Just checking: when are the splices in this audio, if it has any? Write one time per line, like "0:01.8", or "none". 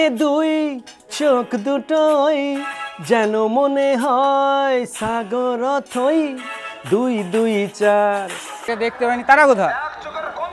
0:08.7